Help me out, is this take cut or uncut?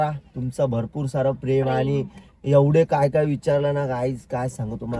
uncut